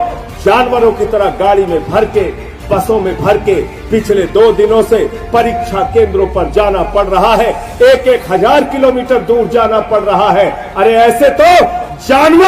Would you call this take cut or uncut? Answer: uncut